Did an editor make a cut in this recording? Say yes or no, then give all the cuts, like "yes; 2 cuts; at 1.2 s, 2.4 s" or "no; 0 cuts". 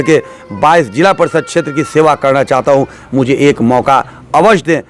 no; 0 cuts